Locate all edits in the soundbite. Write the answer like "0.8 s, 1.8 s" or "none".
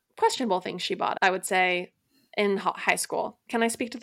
1.1 s